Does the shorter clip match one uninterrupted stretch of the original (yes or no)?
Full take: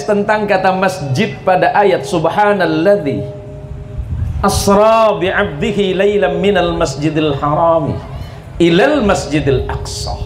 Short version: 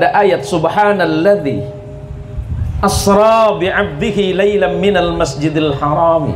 yes